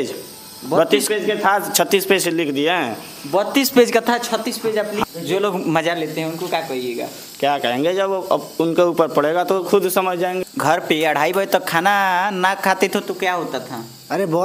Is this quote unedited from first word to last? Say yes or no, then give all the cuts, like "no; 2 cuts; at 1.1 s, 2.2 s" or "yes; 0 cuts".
no; 2 cuts; at 5.0 s, 10.4 s